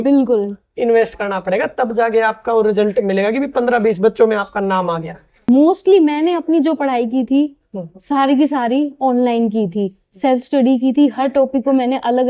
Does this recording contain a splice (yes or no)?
yes